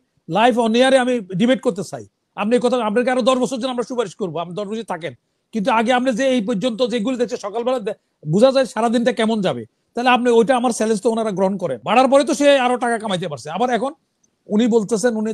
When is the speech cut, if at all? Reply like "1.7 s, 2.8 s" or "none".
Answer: 11.7 s